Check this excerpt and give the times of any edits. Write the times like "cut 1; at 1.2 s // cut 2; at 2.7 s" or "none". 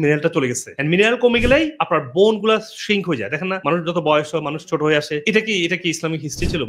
none